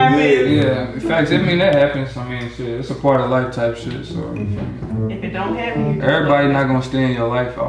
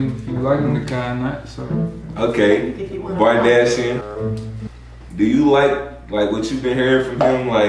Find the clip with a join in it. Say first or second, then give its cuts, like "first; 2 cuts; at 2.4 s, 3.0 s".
second; 1 cut; at 4.5 s